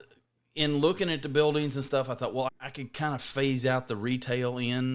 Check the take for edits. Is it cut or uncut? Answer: cut